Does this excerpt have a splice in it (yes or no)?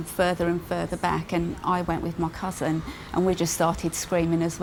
no